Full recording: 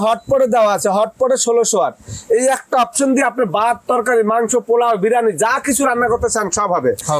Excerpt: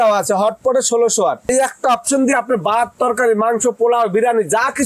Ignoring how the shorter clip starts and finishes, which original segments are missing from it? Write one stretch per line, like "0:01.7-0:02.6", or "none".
0:02.1-0:02.4